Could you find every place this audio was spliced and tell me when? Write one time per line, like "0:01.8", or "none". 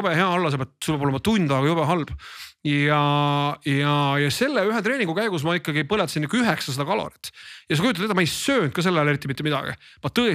none